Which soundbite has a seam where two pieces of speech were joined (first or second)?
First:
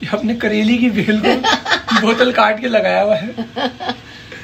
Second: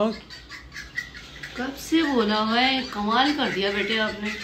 first